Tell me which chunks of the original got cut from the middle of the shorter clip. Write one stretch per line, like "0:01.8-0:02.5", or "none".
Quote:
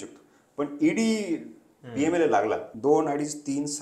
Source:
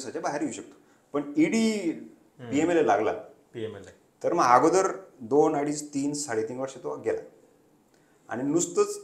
0:03.3-0:05.2

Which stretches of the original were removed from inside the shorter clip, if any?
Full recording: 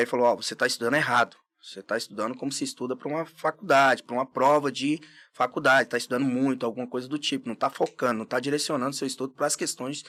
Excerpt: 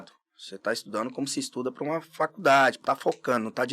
0:04.0-0:07.5

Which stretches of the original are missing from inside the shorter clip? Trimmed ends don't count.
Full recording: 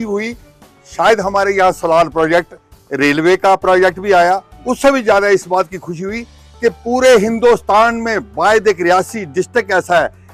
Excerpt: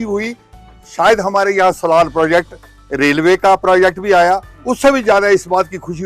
none

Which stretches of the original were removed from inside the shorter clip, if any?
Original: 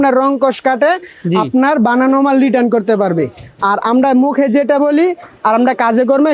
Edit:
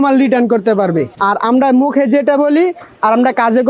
0:03.4-0:03.6

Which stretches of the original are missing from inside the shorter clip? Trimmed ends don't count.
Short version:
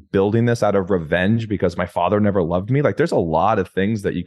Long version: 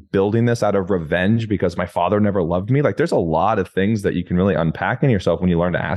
none

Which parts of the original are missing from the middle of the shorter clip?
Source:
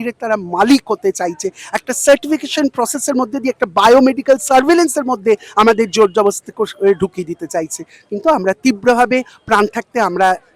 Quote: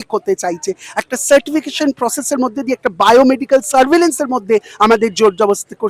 none

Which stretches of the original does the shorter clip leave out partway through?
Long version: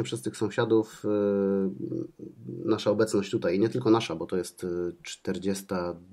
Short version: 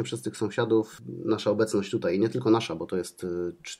0:01.0-0:02.4

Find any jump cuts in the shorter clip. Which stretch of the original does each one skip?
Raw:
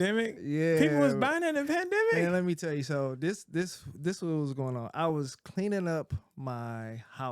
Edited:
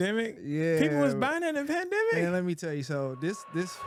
none

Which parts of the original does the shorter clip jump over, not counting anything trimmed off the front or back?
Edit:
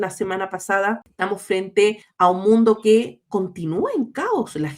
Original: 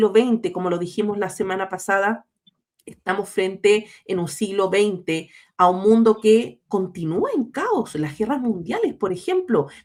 0:02.3-0:02.9
0:03.9-0:05.4

